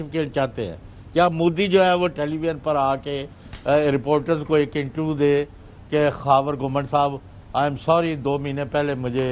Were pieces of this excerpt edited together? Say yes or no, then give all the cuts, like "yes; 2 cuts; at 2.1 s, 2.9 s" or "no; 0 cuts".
yes; 1 cut; at 2.1 s